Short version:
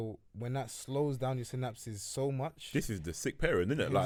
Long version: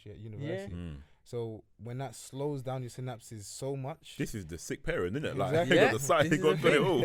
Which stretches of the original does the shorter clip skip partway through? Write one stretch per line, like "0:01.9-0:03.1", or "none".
none